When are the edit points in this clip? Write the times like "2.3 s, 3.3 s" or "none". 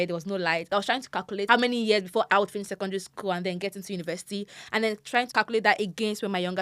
1.0 s, 2.3 s, 5.3 s